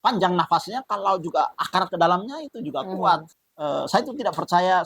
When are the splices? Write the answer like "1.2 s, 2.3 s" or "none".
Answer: 3.3 s